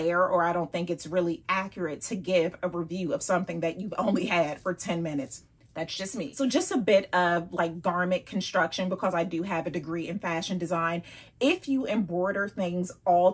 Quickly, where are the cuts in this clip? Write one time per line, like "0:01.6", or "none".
0:06.3